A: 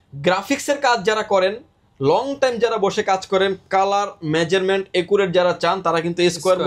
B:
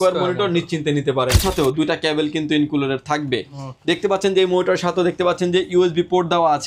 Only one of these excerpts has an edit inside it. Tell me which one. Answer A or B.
B